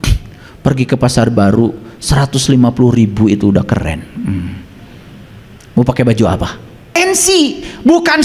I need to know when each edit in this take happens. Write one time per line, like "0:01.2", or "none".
0:07.0